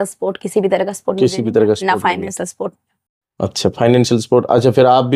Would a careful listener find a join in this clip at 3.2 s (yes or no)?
no